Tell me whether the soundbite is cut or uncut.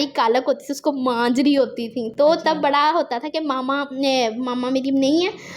uncut